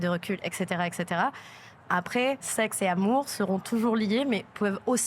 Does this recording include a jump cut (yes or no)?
yes